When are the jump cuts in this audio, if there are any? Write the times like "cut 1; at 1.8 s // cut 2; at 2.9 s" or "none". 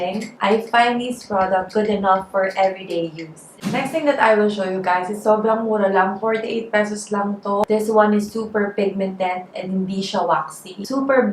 cut 1; at 3.6 s // cut 2; at 7.6 s